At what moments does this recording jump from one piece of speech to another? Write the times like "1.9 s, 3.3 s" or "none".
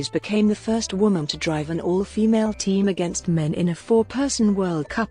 none